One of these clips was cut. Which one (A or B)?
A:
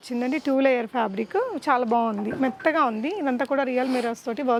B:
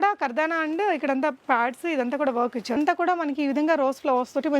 B